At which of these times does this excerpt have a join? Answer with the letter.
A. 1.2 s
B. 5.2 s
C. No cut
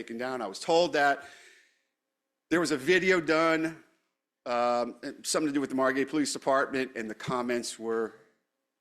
C